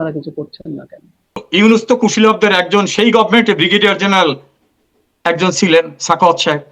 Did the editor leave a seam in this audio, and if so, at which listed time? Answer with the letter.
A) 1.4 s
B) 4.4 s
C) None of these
A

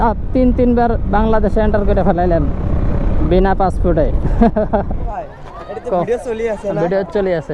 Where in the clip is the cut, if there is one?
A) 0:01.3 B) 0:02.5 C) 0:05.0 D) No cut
C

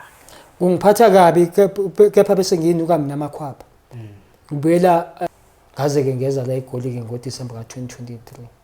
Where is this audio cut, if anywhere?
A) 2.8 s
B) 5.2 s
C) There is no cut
B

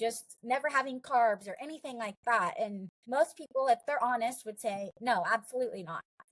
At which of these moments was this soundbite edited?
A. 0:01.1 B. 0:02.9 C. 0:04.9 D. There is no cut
B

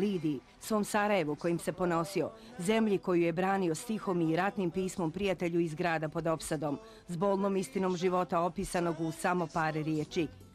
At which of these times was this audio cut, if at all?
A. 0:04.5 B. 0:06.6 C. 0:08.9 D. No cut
B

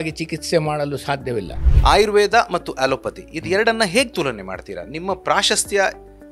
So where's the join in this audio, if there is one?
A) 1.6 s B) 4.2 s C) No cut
A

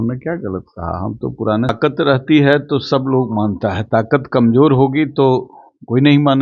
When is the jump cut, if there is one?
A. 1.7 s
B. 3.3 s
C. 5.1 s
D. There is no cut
A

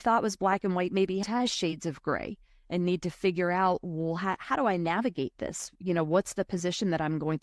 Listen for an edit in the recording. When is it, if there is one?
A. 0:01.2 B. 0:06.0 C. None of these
A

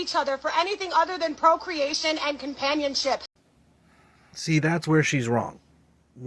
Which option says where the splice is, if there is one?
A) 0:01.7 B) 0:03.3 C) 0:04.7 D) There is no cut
D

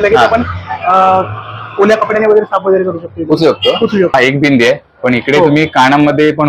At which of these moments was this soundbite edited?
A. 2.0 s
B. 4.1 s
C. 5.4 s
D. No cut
B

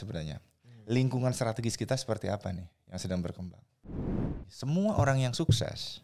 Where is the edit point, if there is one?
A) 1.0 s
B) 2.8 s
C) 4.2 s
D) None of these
C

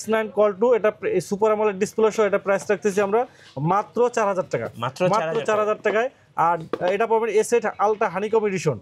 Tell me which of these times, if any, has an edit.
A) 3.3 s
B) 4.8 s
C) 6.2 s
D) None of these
D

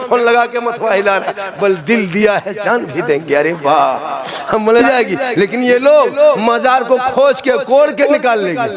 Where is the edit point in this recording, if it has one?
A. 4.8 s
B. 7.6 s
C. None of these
A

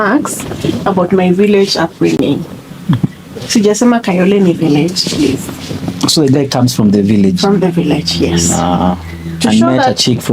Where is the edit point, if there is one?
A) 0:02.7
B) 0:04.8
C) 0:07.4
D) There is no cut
D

